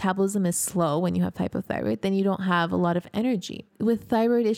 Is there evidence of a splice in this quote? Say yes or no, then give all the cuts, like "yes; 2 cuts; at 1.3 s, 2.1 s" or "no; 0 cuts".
yes; 1 cut; at 3.7 s